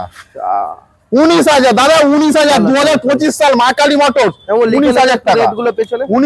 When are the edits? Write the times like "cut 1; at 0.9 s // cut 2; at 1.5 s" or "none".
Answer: none